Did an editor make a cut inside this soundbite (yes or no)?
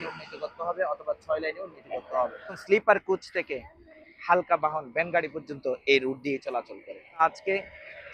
yes